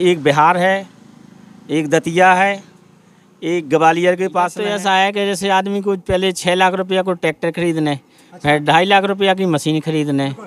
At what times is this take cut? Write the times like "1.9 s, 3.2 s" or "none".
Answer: 4.6 s